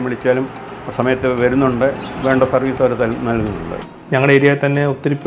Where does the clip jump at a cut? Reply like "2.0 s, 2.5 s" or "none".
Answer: 3.9 s